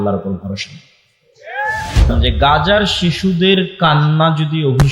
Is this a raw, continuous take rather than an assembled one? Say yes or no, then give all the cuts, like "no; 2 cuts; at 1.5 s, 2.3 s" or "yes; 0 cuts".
no; 1 cut; at 1.9 s